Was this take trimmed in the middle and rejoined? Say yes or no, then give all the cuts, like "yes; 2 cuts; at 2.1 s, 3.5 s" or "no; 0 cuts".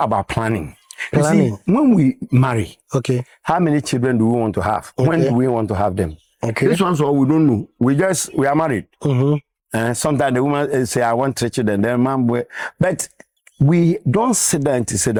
no; 0 cuts